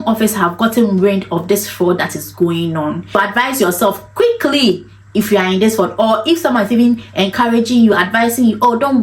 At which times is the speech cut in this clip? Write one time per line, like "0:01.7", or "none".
0:03.2

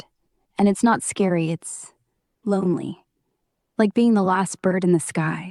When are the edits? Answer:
none

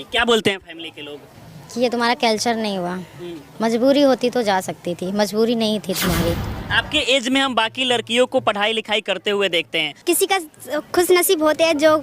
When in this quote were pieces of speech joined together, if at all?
0:06.5
0:09.8

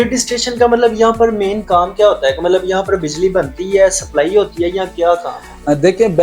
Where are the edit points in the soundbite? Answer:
none

